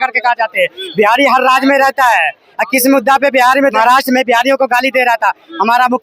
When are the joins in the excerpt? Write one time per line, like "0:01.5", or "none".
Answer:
0:03.7

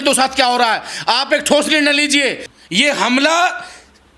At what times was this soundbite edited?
0:02.5

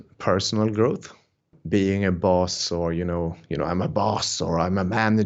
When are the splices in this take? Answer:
0:01.2

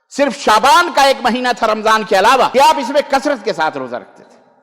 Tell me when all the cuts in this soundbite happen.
0:02.5

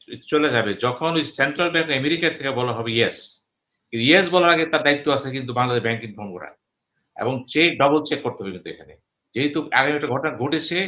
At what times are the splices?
none

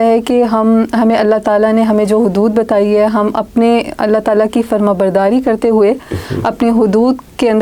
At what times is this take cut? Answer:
none

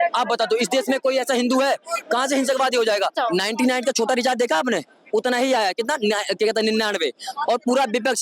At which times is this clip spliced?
0:03.2

